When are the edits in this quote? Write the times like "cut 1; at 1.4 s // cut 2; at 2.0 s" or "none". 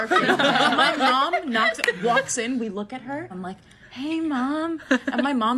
cut 1; at 3.5 s